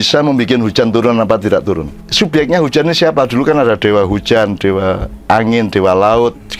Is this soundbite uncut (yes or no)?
no